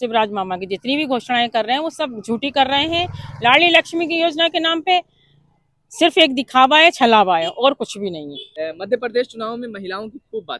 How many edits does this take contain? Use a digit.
1